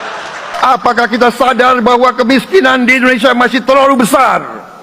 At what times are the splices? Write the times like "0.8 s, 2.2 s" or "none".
none

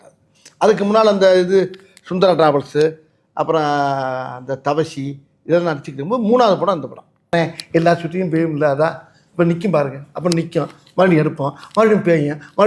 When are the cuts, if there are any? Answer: 7.3 s

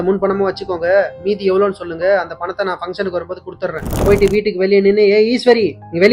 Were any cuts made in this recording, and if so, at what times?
3.9 s

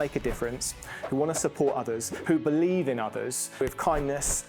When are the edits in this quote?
3.6 s

